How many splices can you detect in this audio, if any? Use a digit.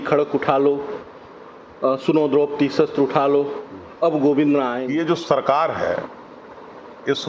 1